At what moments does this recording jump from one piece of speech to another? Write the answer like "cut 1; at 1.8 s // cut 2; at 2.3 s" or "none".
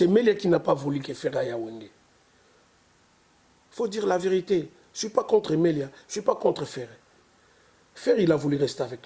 none